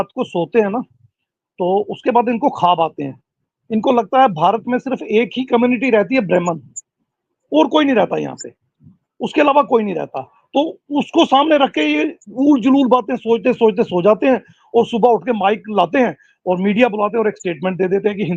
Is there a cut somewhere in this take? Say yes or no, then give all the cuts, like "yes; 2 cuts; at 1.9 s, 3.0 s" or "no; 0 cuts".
no; 0 cuts